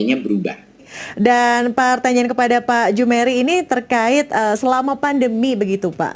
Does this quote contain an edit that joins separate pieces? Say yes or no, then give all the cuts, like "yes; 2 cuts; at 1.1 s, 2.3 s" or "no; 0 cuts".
yes; 1 cut; at 1.1 s